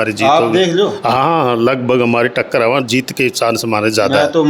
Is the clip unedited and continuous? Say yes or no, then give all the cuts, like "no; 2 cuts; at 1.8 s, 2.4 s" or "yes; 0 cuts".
yes; 0 cuts